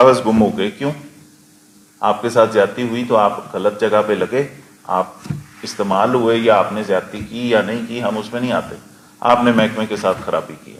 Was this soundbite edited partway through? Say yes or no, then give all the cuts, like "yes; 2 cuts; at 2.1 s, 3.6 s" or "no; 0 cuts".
no; 0 cuts